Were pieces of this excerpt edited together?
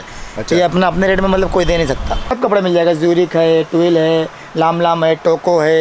yes; 1 cut; at 2.2 s

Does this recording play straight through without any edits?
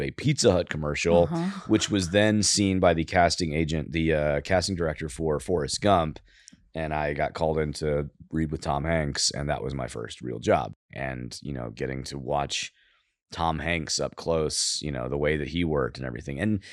no; 1 cut; at 10.7 s

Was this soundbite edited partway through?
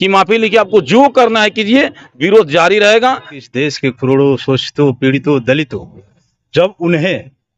yes; 1 cut; at 3.4 s

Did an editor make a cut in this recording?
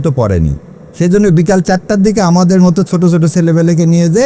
no; 0 cuts

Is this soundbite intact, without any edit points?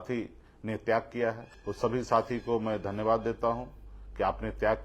no; 1 cut; at 1.5 s

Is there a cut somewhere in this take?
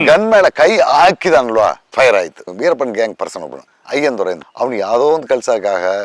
yes; 2 cuts; at 1.8 s, 2.5 s

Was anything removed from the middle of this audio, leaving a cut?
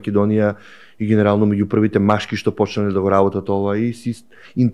no; 0 cuts

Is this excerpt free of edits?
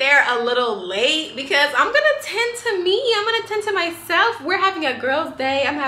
yes; 0 cuts

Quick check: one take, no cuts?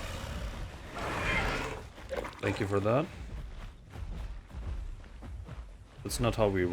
no; 1 cut; at 4.5 s

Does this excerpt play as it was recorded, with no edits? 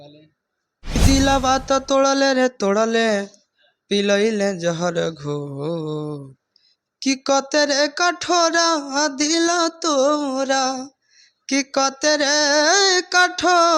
no; 1 cut; at 1.0 s

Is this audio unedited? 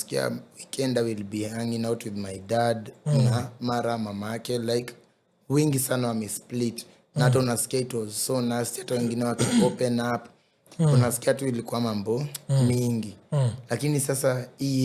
yes; 0 cuts

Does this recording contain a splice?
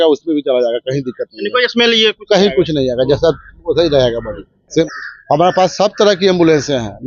no; 0 cuts

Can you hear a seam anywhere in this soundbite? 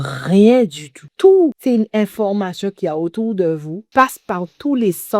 yes; 3 cuts; at 1.0 s, 1.6 s, 3.8 s

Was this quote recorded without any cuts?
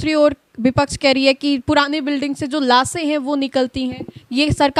yes; 0 cuts

